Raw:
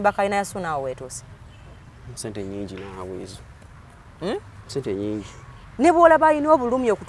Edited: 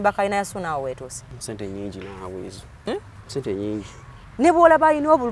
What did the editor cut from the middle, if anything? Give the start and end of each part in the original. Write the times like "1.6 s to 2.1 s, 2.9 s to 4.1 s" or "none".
1.3 s to 2.0 s, 3.6 s to 4.3 s